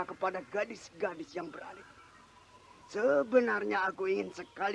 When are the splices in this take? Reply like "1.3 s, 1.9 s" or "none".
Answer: none